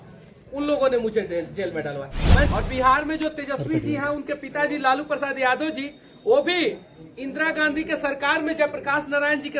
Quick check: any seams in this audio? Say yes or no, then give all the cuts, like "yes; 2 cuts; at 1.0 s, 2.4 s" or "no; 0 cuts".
yes; 1 cut; at 2.5 s